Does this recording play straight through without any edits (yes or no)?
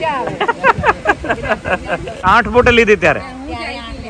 no